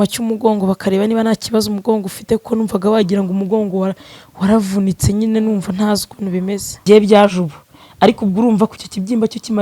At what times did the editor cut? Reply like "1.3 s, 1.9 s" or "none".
6.7 s